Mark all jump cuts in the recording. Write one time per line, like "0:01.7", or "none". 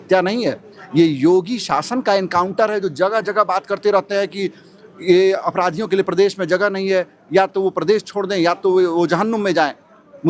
none